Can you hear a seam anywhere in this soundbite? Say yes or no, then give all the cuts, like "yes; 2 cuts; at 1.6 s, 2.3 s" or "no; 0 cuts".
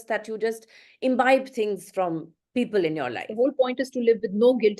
yes; 1 cut; at 3.2 s